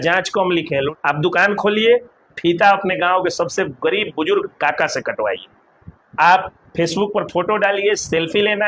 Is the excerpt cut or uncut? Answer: cut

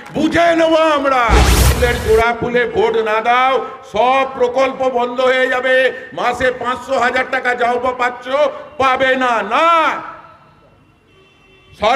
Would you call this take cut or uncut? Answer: cut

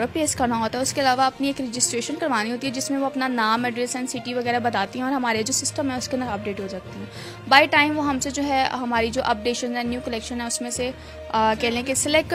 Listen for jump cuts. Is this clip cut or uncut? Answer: uncut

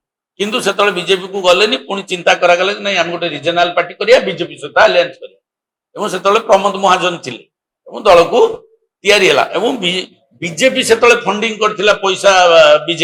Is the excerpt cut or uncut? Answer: uncut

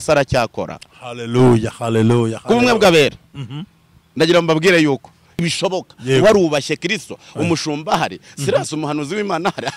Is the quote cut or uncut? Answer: cut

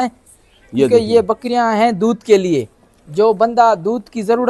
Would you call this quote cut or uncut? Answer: uncut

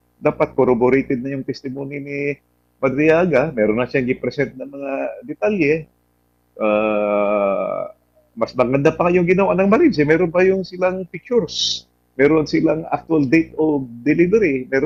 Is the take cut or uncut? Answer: uncut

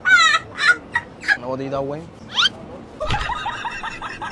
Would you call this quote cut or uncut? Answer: cut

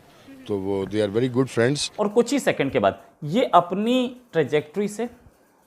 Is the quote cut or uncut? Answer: cut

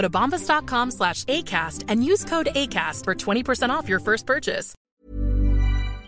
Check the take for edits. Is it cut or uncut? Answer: cut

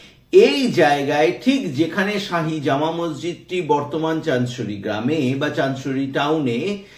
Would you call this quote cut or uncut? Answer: uncut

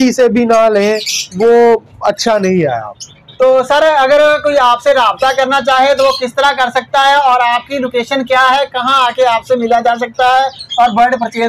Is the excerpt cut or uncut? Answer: uncut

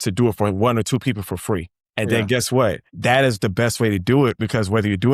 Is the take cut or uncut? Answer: cut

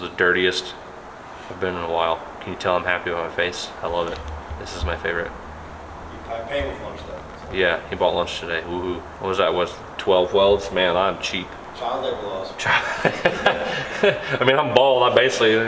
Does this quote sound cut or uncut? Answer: cut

